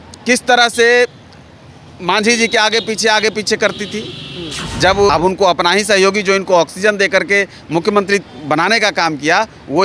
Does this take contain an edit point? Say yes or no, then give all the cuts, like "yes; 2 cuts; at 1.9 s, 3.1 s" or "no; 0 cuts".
yes; 1 cut; at 5.1 s